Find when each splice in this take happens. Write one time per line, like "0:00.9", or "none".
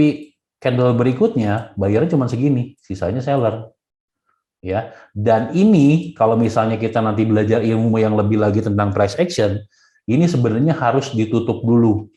none